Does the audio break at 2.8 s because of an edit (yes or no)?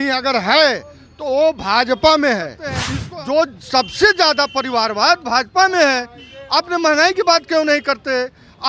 yes